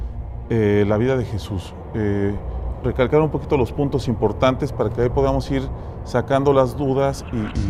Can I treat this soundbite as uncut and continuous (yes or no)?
yes